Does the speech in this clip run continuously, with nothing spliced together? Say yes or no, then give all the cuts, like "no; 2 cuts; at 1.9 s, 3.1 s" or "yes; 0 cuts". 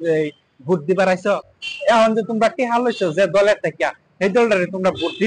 no; 1 cut; at 1.4 s